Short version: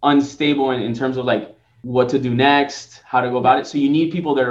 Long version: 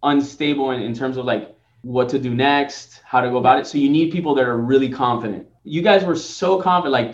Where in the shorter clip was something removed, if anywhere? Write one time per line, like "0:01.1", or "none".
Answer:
none